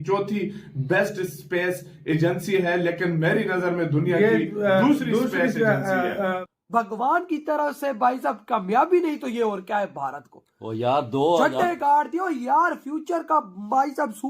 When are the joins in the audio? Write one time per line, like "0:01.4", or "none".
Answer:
0:06.4

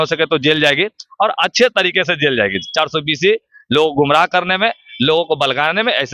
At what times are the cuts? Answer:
none

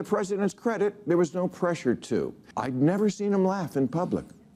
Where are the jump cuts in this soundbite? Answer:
0:02.4

